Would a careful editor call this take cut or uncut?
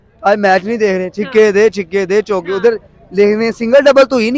uncut